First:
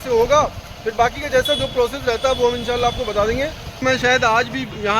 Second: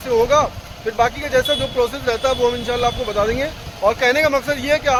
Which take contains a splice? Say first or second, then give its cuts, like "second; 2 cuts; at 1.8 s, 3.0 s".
first; 1 cut; at 3.8 s